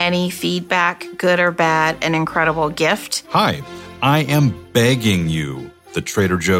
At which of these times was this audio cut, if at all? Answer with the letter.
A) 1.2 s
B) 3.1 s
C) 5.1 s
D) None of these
B